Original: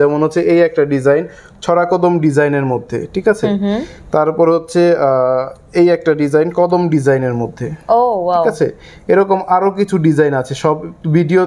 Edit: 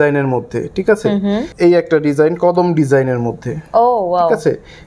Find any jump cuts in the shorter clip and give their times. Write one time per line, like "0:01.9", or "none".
0:01.5